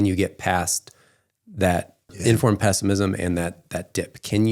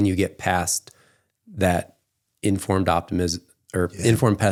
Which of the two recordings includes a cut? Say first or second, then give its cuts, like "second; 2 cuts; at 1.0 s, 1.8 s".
first; 1 cut; at 2.2 s